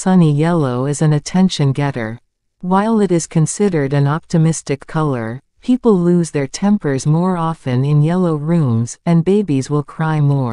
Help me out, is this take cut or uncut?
uncut